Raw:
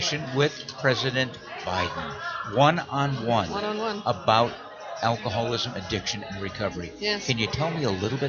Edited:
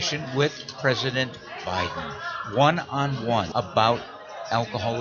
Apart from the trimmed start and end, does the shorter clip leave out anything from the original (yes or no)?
yes